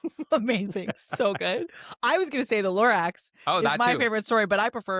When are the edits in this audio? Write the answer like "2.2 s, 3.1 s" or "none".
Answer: none